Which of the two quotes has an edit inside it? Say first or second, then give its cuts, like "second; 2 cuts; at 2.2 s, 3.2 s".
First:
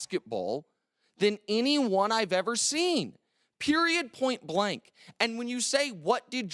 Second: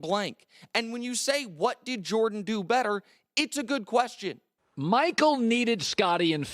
second; 1 cut; at 4.6 s